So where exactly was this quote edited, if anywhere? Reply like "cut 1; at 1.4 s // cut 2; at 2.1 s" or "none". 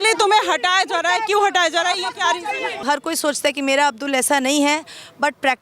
cut 1; at 2.8 s